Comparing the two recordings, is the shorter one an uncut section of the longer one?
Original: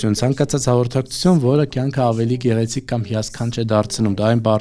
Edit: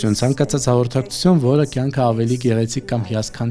yes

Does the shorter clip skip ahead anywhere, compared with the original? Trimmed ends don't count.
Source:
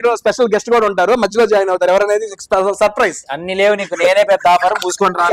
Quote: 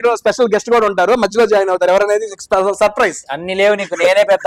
no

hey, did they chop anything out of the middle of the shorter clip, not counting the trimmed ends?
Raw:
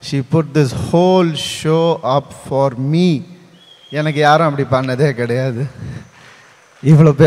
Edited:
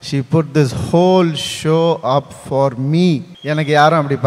yes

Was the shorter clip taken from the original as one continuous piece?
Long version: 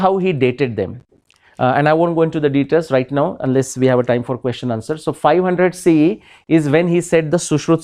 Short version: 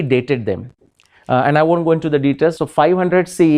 no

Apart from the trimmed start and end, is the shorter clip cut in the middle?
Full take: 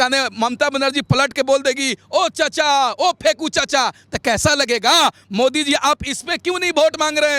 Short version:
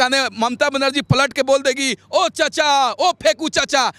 no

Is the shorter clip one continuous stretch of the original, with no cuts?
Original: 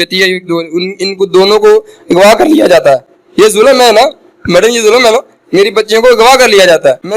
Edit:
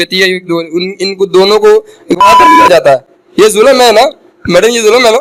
yes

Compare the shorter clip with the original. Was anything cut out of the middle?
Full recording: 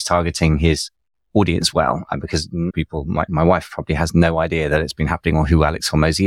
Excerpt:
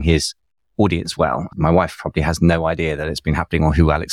yes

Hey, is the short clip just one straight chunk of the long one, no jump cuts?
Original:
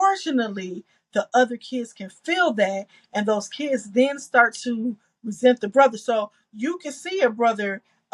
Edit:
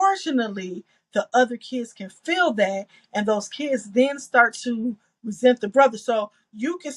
yes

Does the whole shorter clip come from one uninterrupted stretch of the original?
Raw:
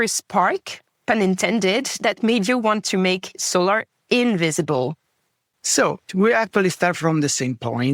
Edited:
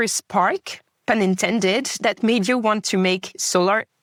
yes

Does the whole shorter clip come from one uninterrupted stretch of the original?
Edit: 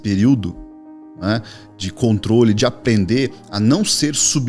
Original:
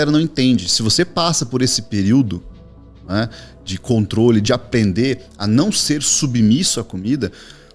yes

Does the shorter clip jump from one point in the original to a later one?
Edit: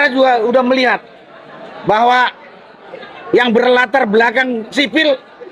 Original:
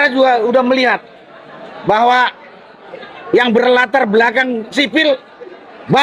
no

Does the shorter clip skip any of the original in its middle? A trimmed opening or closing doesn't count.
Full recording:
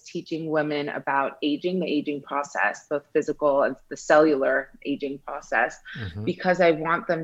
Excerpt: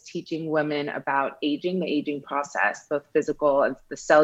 no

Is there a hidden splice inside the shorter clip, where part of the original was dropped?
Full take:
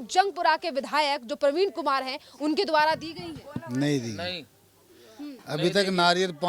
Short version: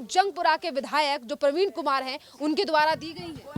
no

